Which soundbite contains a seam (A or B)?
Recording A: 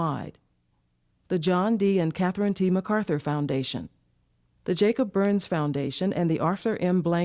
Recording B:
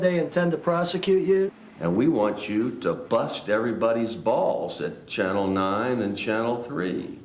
B